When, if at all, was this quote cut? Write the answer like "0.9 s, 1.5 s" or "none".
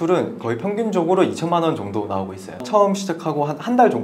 2.6 s

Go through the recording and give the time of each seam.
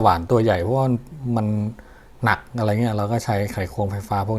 none

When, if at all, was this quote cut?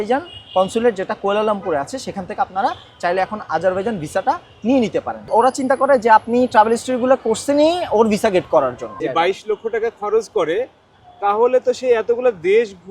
5.2 s, 9.0 s

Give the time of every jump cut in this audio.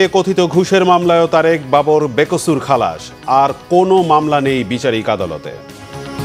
none

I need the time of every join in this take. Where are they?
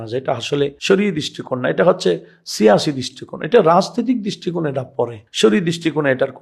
none

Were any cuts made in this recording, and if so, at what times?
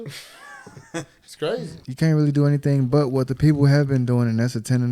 1.8 s

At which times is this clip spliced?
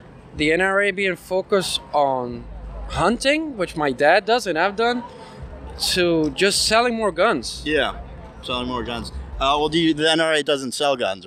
none

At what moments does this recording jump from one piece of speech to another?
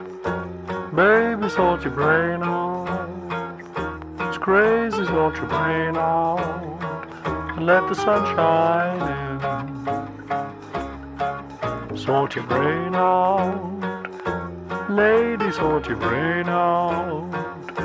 12.3 s

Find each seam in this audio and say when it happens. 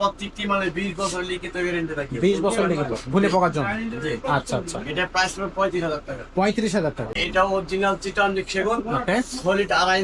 7.2 s

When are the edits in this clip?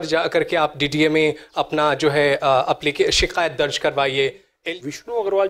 4.5 s

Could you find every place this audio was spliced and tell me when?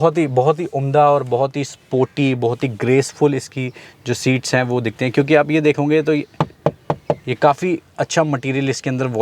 none

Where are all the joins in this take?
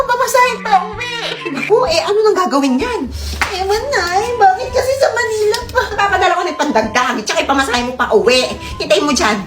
5.9 s

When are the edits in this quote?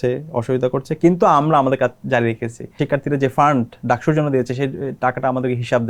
2.8 s

